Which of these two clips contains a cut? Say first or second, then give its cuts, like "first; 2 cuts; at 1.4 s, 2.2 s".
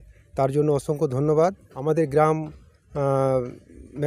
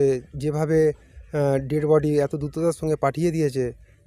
first; 1 cut; at 1.7 s